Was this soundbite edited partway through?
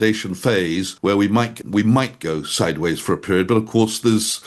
yes; 2 cuts; at 0.9 s, 1.6 s

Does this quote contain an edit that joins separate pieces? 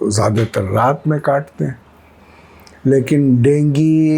no; 0 cuts

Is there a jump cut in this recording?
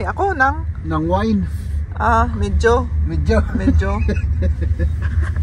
no; 0 cuts

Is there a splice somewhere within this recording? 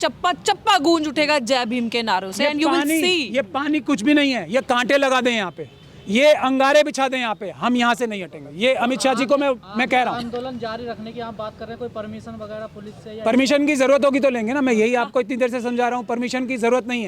no; 0 cuts

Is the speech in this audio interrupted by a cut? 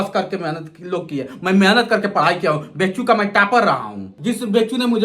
yes; 1 cut; at 4.1 s

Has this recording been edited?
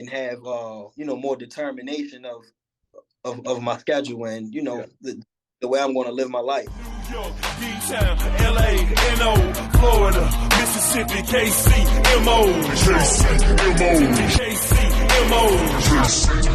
yes; 1 cut; at 7.1 s

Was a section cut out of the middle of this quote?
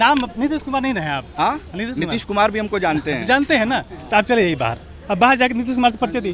no; 0 cuts

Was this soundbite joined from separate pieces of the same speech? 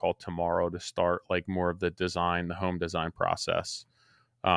no; 0 cuts

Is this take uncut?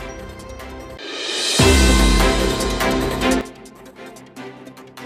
no; 2 cuts; at 1.0 s, 3.4 s

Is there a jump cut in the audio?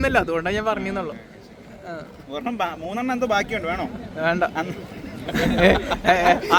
no; 0 cuts

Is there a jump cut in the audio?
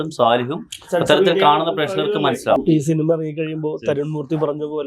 yes; 1 cut; at 2.6 s

